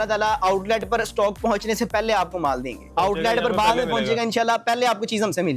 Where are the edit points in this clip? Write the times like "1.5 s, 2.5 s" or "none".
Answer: 2.9 s